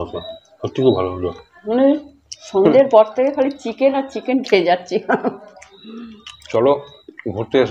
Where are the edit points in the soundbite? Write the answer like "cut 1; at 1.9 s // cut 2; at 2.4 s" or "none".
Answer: cut 1; at 1.6 s